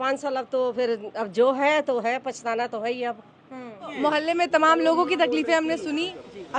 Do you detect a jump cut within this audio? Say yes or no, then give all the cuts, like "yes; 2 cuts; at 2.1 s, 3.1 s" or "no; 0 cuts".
yes; 1 cut; at 3.9 s